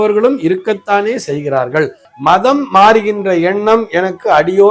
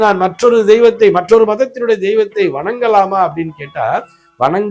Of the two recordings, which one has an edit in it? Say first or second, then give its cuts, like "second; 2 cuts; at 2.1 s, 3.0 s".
first; 1 cut; at 2.0 s